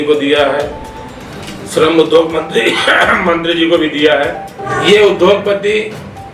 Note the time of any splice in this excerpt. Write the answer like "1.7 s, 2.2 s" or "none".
4.7 s